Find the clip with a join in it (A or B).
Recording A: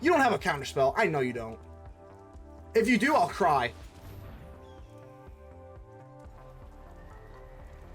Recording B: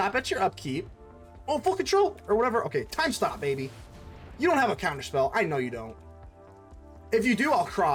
A